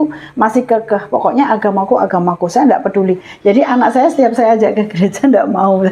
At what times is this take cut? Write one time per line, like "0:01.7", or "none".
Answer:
none

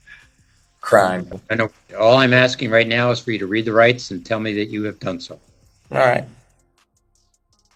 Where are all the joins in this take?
none

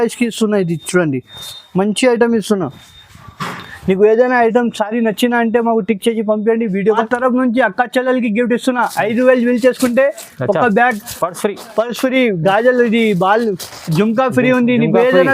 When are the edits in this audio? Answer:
0:07.0

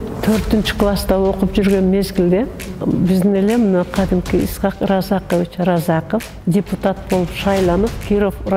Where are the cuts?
0:02.8
0:06.3

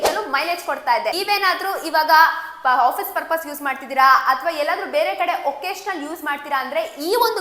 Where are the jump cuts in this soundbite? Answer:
0:01.1

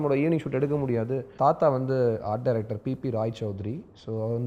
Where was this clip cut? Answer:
0:01.3

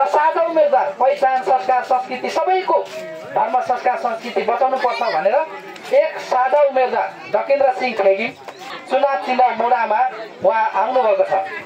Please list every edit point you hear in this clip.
0:08.7

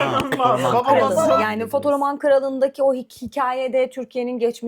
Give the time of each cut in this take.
0:01.4

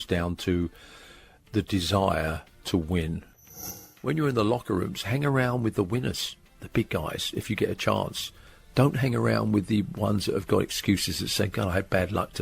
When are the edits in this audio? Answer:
0:03.5

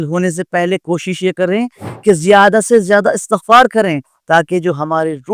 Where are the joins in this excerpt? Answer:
none

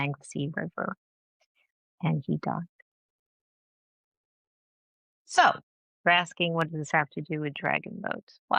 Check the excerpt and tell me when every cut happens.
none

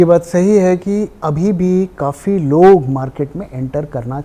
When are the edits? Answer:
none

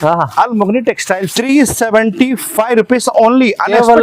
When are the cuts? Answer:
0:01.3

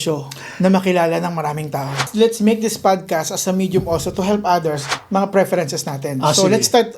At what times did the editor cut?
0:02.0
0:04.9

